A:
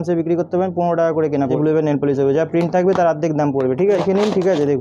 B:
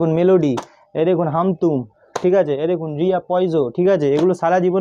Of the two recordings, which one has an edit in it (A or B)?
A